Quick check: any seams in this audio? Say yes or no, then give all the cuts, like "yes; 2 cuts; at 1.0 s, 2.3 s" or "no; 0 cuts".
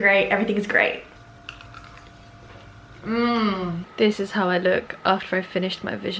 yes; 2 cuts; at 1.0 s, 3.8 s